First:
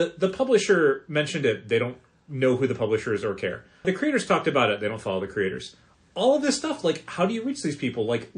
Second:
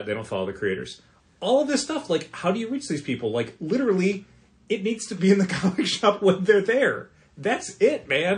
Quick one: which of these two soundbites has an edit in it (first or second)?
first